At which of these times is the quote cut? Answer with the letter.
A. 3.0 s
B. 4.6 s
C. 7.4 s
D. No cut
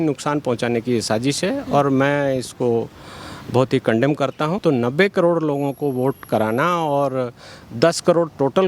B